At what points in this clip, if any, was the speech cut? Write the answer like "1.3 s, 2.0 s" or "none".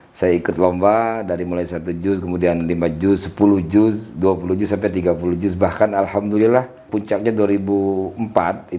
6.9 s